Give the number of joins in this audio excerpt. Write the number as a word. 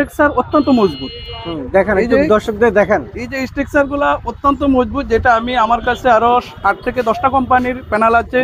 zero